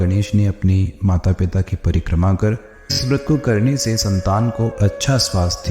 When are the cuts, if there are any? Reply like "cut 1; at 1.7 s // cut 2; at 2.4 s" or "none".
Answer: cut 1; at 3.0 s